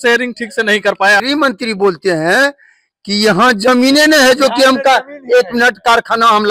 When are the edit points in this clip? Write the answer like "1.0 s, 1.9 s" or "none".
1.2 s

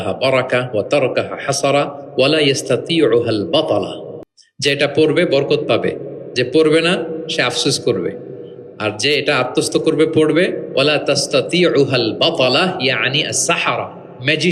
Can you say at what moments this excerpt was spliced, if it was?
none

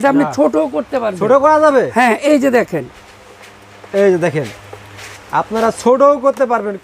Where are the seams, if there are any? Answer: none

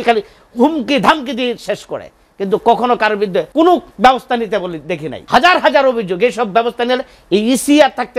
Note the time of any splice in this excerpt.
3.5 s, 5.1 s

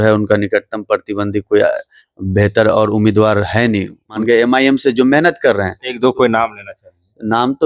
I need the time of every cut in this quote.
4.1 s

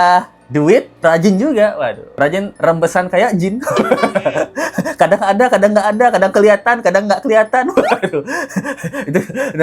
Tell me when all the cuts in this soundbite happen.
none

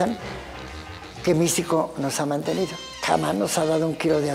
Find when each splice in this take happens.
2.9 s

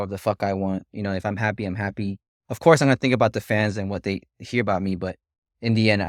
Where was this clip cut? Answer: none

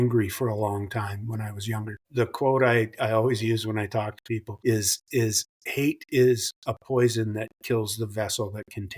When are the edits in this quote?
2.0 s, 4.5 s

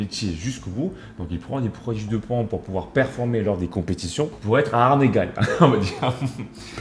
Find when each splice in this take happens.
4.4 s

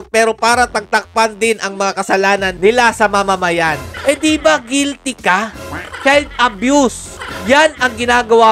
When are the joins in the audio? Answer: 3.9 s

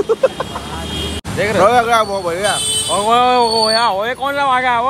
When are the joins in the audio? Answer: 1.2 s

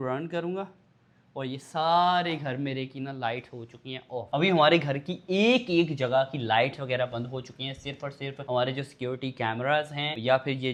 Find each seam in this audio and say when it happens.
none

